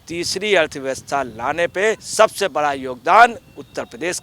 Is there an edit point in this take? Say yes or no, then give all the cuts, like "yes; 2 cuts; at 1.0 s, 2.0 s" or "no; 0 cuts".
yes; 1 cut; at 2.1 s